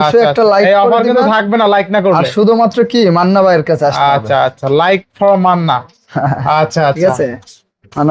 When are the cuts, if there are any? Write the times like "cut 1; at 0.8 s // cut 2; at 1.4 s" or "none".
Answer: none